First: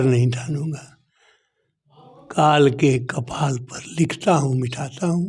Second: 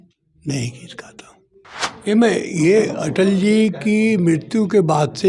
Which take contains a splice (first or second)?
second